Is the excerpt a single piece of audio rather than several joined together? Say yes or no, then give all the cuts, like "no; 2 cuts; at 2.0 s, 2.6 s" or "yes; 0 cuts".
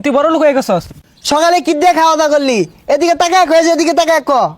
no; 1 cut; at 0.9 s